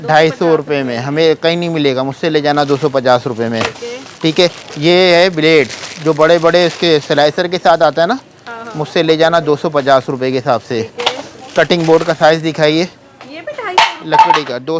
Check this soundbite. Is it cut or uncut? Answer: uncut